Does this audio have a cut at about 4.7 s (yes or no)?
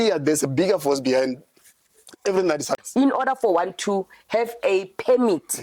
no